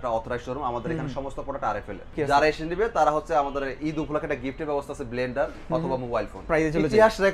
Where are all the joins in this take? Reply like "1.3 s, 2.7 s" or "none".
2.1 s, 6.4 s